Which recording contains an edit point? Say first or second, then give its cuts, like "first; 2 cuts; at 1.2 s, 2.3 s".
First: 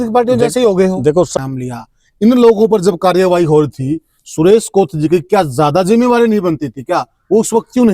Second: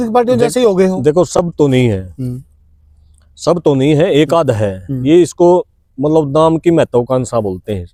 first; 1 cut; at 1.3 s